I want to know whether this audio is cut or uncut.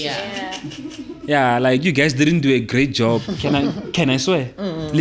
uncut